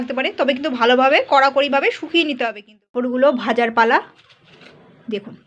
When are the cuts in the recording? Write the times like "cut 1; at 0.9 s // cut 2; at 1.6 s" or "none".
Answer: cut 1; at 2.9 s